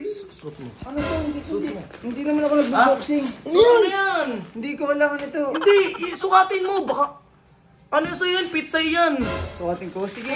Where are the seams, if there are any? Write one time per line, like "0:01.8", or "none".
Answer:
none